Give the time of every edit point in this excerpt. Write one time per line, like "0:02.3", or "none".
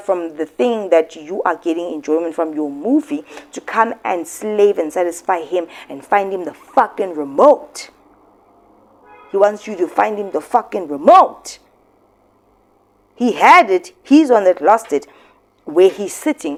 none